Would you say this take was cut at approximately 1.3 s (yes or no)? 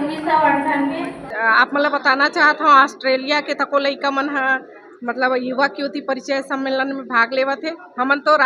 yes